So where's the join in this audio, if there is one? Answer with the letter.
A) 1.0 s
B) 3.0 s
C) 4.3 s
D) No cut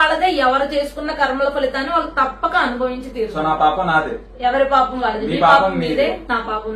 D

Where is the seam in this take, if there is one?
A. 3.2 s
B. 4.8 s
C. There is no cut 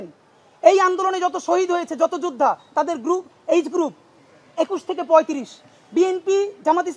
C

